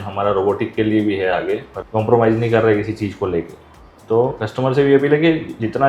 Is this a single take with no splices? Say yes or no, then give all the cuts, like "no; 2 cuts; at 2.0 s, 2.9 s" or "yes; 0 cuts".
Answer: no; 1 cut; at 1.7 s